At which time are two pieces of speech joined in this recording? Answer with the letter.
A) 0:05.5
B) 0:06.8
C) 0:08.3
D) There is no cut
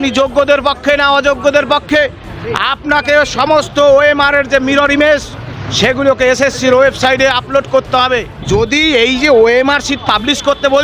C